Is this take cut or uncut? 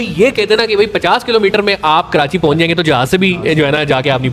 uncut